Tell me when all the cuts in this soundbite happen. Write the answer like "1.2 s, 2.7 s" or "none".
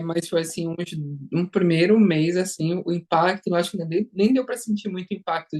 none